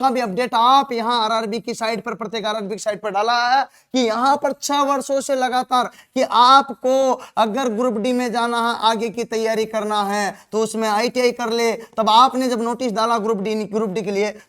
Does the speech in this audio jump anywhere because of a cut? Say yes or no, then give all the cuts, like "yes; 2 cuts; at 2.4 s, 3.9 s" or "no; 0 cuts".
no; 0 cuts